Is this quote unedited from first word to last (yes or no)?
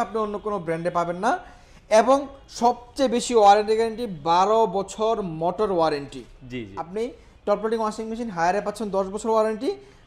yes